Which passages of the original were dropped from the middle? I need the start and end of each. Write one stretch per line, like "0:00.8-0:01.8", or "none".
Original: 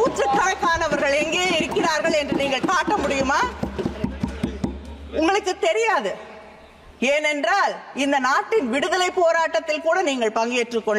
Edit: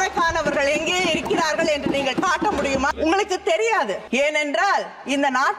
0:03.4-0:05.1
0:06.2-0:06.9